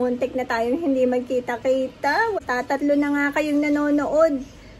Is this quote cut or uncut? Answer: cut